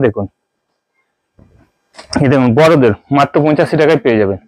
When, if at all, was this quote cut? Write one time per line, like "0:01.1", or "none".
none